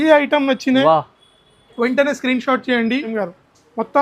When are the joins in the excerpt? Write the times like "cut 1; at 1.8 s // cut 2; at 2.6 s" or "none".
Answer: cut 1; at 3.1 s